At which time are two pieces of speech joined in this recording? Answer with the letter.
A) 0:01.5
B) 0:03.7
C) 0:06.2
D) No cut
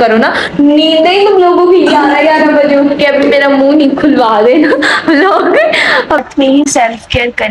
C